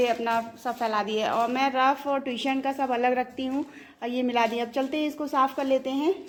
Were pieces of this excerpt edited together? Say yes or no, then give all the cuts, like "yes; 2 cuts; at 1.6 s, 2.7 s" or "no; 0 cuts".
no; 0 cuts